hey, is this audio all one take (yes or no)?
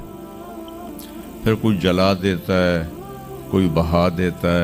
yes